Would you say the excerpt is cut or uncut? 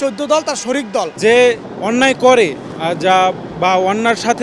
cut